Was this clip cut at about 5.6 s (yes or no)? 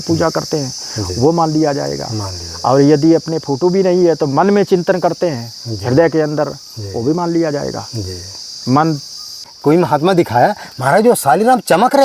no